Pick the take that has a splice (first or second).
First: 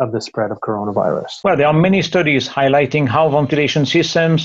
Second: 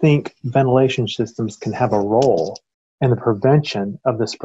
first